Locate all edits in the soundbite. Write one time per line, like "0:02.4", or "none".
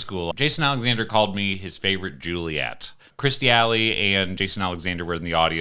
0:03.1